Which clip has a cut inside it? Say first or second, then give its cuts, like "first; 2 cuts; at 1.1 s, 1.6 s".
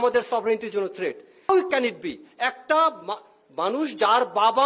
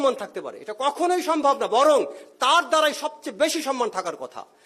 first; 1 cut; at 1.5 s